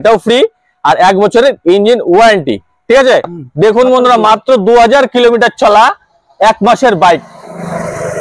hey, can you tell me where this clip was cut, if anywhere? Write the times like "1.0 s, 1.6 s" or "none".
3.3 s